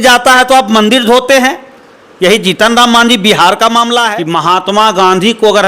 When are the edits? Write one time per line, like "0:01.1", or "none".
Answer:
0:04.2